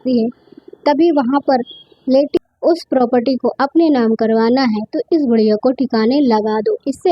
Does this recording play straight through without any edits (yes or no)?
no